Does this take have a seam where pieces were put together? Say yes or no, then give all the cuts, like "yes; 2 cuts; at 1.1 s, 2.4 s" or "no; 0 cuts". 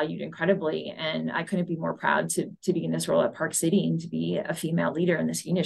no; 0 cuts